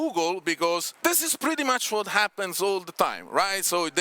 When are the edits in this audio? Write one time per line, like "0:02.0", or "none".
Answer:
0:00.9